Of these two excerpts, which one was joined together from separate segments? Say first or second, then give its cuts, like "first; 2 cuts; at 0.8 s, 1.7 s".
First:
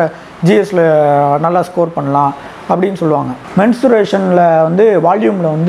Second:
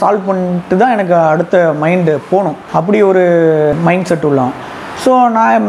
first; 1 cut; at 3.4 s